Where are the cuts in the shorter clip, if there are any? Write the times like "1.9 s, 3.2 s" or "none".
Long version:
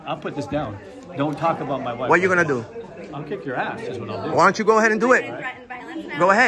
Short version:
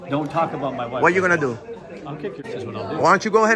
2.4 s